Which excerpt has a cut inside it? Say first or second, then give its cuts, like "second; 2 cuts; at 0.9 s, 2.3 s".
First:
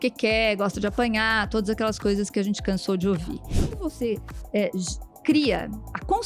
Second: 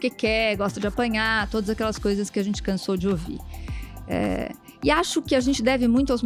first; 1 cut; at 3.7 s